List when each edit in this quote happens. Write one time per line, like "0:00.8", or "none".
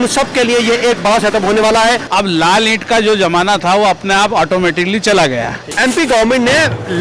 0:02.1
0:05.7